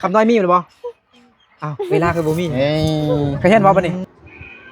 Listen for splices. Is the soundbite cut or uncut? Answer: cut